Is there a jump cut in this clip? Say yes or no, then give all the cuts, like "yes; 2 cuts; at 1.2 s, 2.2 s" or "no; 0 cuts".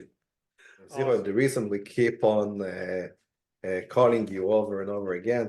yes; 1 cut; at 1.1 s